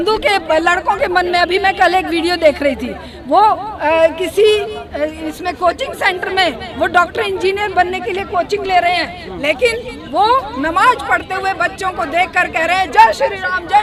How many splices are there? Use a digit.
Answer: 0